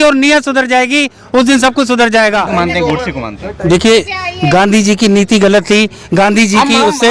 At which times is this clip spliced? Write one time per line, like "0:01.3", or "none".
0:02.5